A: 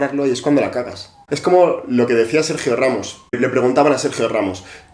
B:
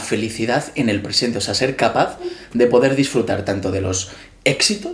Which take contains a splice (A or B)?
A